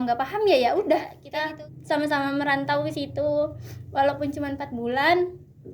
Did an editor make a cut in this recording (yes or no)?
yes